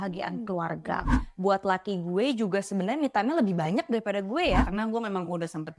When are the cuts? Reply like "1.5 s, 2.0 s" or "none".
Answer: 1.2 s, 4.7 s